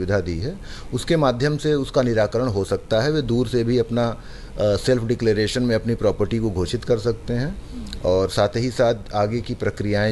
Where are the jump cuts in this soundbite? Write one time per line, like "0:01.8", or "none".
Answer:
none